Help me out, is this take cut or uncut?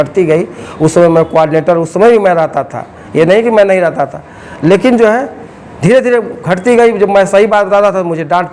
uncut